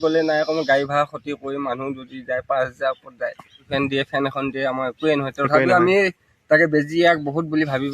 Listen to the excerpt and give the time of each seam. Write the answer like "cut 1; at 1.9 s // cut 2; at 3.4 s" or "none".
cut 1; at 3.7 s